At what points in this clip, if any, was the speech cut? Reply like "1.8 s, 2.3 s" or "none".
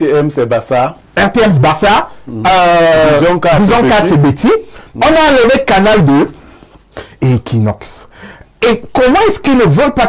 none

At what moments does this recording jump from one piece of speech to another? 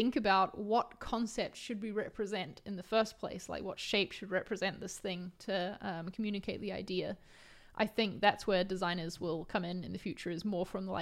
none

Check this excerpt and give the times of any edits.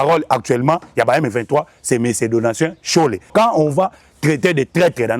3.3 s

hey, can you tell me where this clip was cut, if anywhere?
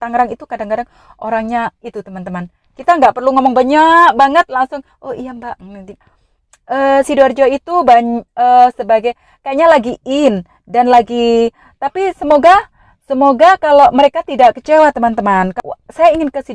6.1 s, 15.6 s

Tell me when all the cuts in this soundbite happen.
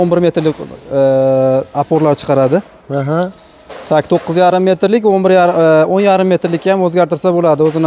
none

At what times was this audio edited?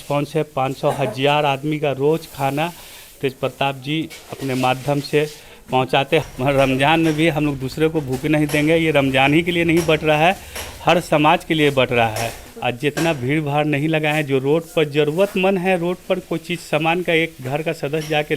6.2 s, 12.4 s

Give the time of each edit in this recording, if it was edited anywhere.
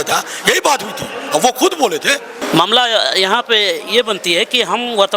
2.3 s

